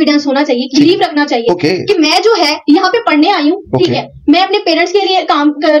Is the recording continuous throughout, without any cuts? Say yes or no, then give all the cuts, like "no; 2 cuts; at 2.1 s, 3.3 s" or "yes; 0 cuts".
yes; 0 cuts